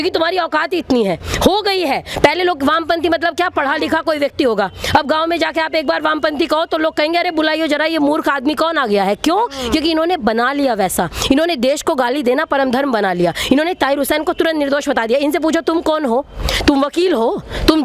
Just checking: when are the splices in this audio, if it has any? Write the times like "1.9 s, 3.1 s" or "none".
none